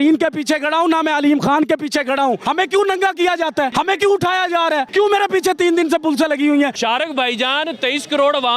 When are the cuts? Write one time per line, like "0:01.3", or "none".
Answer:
0:02.4
0:03.7
0:04.9
0:06.8